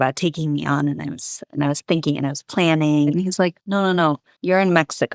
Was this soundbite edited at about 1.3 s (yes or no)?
no